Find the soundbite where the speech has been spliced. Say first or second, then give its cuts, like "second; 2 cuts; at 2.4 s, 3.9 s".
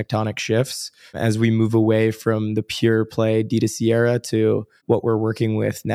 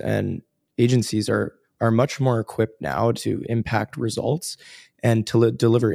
first; 2 cuts; at 1.2 s, 4.8 s